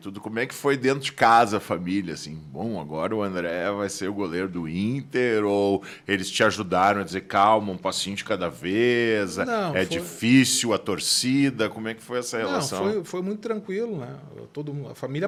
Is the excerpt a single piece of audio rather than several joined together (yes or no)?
yes